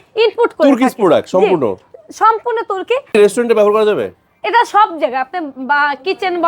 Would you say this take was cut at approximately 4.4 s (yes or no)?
no